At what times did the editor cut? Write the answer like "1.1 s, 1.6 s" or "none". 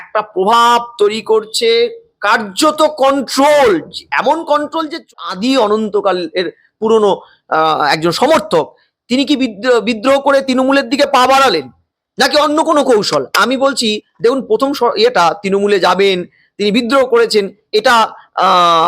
5.1 s